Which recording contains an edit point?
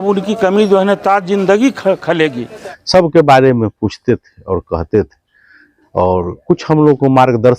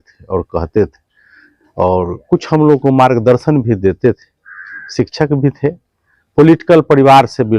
first; 1 cut; at 2.4 s

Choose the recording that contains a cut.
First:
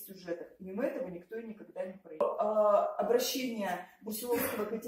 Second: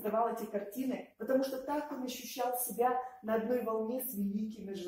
first; 1 cut; at 2.2 s

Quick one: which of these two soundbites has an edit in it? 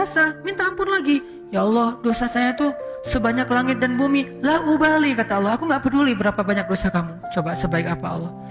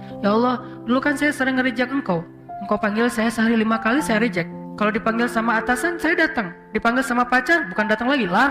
second; 1 cut; at 4.6 s

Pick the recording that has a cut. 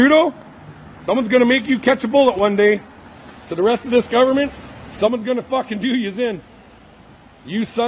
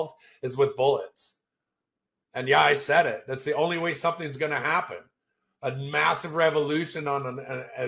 second; 1 cut; at 1.2 s

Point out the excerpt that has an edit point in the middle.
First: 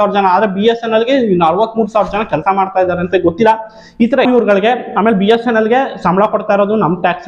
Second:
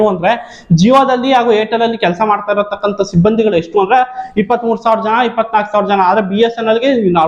first; 1 cut; at 4.3 s

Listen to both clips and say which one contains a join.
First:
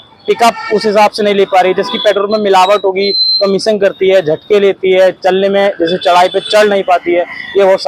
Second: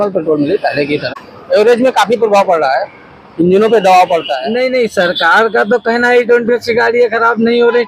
second; 2 cuts; at 1.1 s, 4.4 s

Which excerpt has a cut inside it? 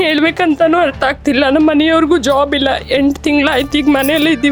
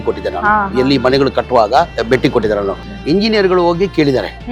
second; 2 cuts; at 2.0 s, 2.9 s

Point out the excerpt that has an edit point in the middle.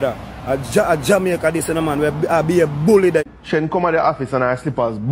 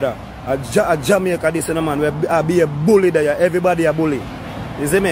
first; 1 cut; at 3.2 s

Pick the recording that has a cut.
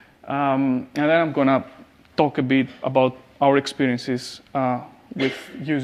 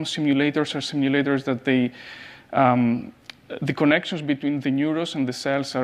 second; 1 cut; at 4.5 s

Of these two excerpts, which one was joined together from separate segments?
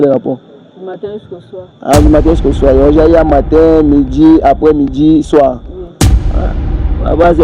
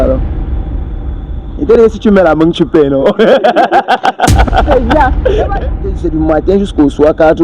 second; 1 cut; at 5.7 s

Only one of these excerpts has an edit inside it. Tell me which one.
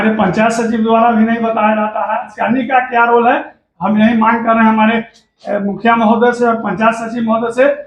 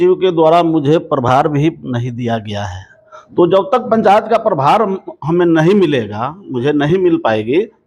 first; 1 cut; at 2.3 s

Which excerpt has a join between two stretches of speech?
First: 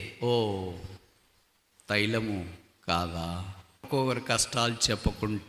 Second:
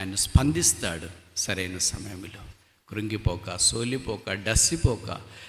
first; 1 cut; at 3.9 s

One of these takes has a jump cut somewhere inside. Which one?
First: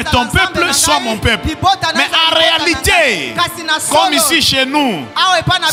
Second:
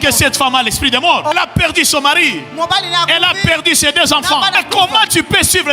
second; 2 cuts; at 1.3 s, 4.6 s

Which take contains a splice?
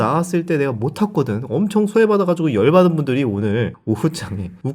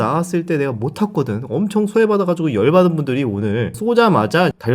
second; 1 cut; at 3.8 s

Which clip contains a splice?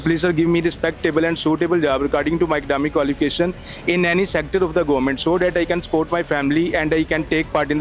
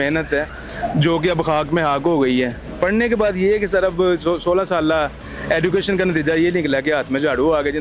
second; 1 cut; at 2.6 s

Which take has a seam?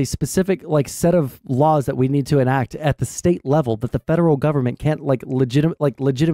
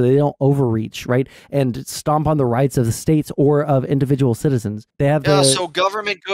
second; 1 cut; at 4.9 s

